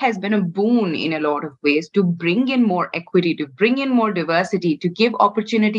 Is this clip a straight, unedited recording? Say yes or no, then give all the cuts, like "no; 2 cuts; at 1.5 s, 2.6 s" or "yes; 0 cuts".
yes; 0 cuts